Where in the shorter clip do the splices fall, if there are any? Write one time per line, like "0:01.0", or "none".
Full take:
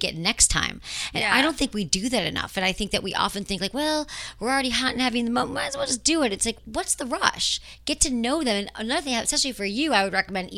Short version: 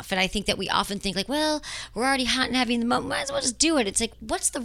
none